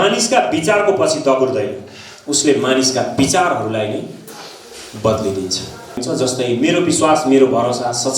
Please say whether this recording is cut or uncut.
cut